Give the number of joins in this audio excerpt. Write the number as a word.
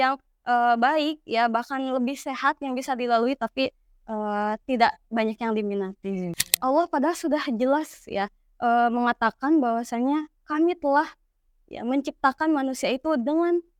one